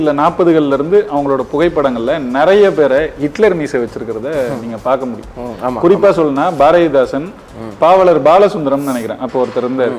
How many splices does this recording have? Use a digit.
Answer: 0